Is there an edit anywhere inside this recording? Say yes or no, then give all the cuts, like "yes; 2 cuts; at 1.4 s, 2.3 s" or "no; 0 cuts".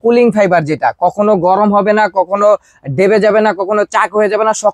no; 0 cuts